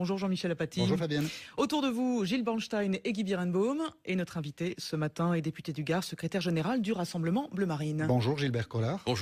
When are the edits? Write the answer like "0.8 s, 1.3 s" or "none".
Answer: none

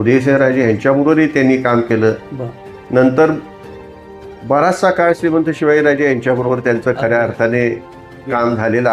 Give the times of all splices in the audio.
none

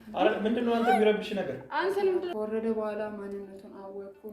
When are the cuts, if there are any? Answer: 2.3 s

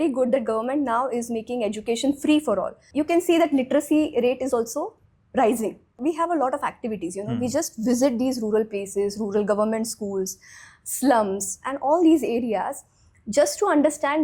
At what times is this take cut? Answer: 2.8 s, 6.0 s

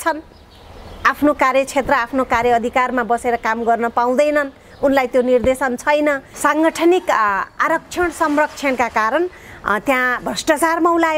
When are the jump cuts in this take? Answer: 6.3 s

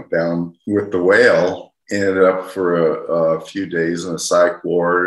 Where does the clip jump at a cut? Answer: 1.8 s

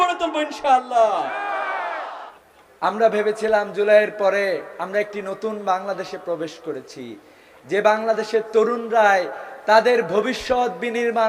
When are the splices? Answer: 2.2 s

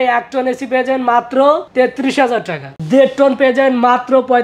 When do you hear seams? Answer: 2.7 s

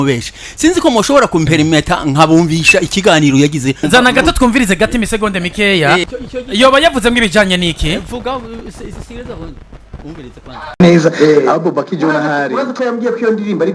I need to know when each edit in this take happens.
3.9 s, 6.0 s

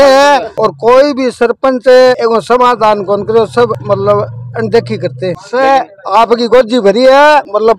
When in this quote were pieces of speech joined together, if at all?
none

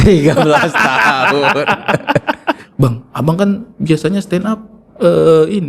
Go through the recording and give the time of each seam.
2.7 s

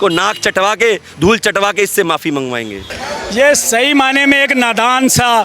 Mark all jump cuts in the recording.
2.8 s

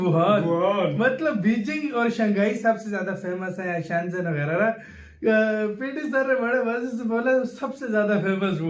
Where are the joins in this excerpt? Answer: none

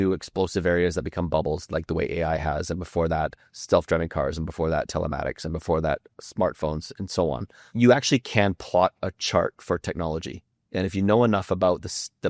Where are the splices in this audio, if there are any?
7.6 s

